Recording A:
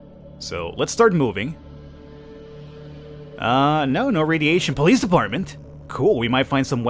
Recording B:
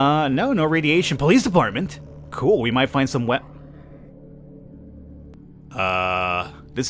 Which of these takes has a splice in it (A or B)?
B